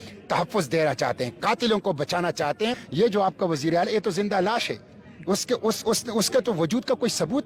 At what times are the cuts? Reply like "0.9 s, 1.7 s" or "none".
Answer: 2.8 s